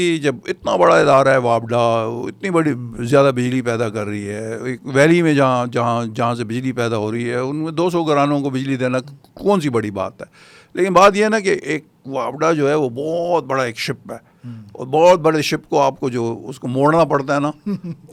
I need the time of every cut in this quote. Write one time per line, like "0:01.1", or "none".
none